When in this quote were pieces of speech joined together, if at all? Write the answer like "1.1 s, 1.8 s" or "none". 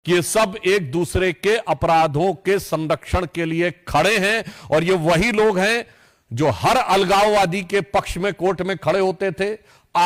none